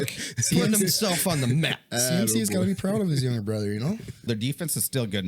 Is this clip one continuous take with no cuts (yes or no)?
no